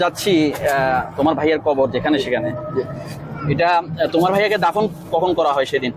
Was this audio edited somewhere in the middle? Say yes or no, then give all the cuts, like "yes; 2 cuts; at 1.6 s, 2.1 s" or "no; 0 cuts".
no; 0 cuts